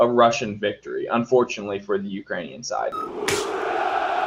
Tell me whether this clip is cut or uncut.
cut